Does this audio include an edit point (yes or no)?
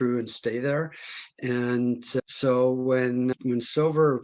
no